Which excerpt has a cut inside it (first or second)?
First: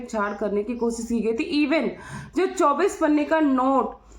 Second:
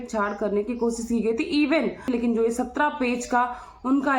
second